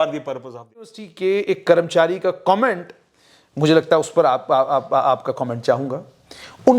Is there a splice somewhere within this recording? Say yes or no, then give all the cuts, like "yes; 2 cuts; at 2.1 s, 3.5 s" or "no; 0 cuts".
yes; 1 cut; at 1.0 s